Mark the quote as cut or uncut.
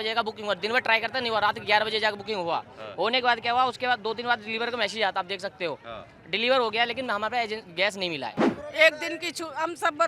cut